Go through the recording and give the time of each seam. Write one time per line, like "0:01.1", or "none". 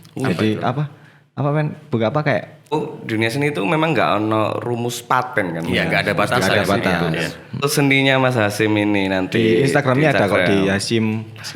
0:02.7
0:07.6